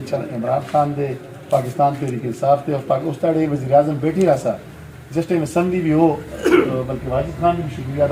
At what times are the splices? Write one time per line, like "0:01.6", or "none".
none